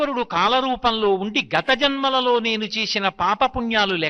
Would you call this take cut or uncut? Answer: uncut